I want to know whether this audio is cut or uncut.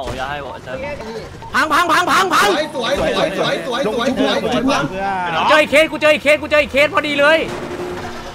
cut